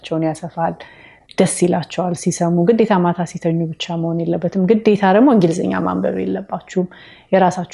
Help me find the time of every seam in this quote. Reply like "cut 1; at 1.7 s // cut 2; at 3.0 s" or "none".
none